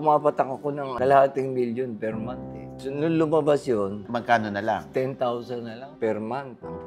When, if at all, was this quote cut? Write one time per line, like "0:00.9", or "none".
0:00.9
0:02.7
0:04.0
0:05.8